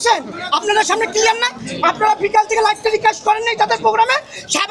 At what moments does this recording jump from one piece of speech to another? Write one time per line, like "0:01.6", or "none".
none